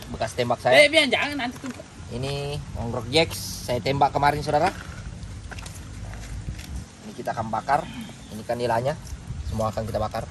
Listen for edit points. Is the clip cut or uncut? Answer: uncut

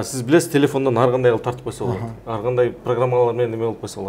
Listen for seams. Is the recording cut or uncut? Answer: uncut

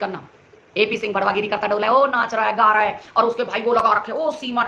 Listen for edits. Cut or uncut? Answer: uncut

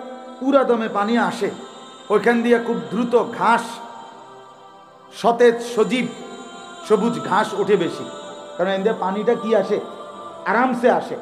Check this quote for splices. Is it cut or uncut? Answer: uncut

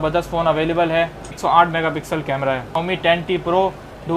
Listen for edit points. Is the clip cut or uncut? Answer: cut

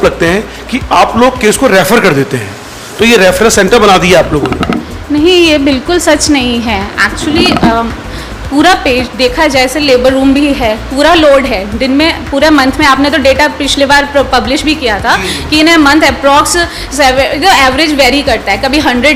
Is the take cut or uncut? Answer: uncut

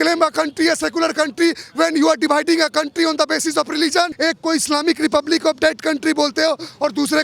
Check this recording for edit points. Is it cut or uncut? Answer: cut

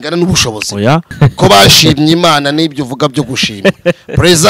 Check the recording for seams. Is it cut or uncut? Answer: cut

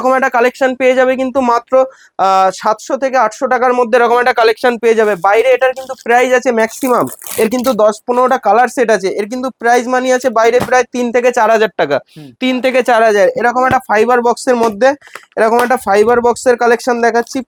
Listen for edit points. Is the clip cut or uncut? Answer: uncut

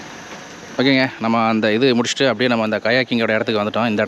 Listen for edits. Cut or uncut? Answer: uncut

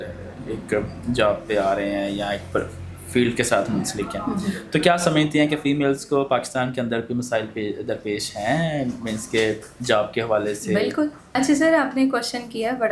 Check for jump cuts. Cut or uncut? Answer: uncut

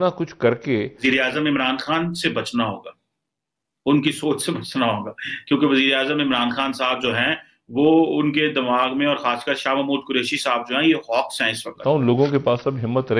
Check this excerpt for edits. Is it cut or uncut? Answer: cut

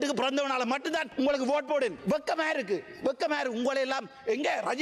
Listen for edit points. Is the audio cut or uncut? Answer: uncut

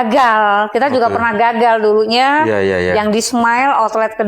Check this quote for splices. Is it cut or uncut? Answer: uncut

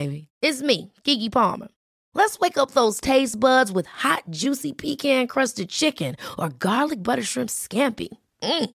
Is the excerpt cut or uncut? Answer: uncut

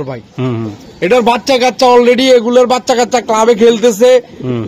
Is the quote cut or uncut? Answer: uncut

